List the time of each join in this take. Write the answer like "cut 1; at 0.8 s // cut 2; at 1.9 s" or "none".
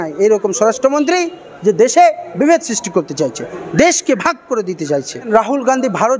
cut 1; at 3.5 s // cut 2; at 5.1 s